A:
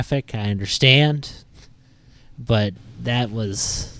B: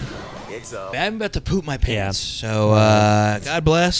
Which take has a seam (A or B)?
B